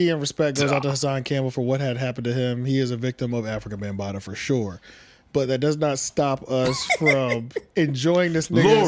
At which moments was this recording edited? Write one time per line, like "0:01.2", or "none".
none